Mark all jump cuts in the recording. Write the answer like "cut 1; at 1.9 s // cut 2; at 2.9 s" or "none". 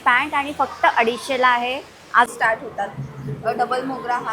cut 1; at 2.3 s